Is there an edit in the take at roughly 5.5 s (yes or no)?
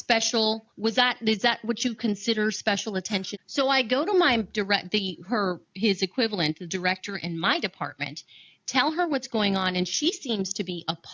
no